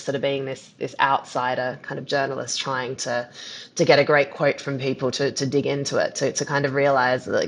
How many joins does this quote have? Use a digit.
0